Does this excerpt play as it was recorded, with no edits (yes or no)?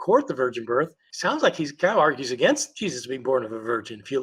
no